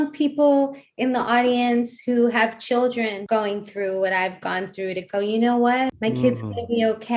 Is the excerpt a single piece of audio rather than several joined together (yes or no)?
no